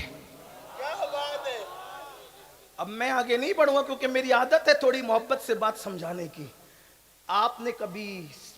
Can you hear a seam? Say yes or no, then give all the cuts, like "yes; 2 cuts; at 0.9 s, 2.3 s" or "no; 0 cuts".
no; 0 cuts